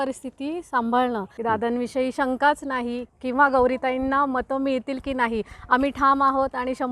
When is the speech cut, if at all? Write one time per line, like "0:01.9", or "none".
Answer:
0:01.3
0:03.1